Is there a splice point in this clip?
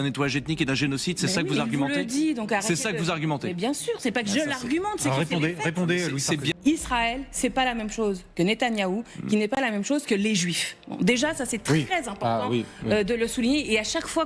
yes; 1 cut; at 6.5 s

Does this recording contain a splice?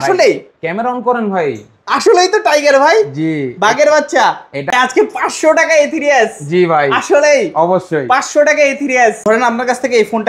yes; 2 cuts; at 4.7 s, 9.2 s

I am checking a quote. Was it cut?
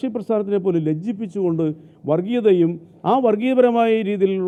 no; 0 cuts

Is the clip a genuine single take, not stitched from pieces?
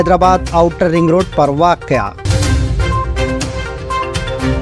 no; 1 cut; at 2.2 s

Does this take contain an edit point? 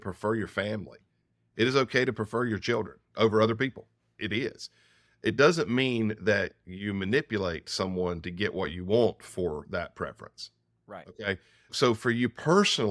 yes; 1 cut; at 4.1 s

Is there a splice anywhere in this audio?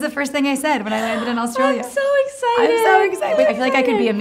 yes; 1 cut; at 3.3 s

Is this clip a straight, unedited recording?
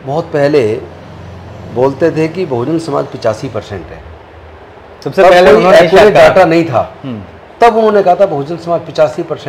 yes; 0 cuts

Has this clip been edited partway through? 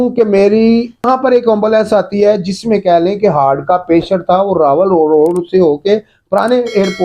yes; 1 cut; at 1.0 s

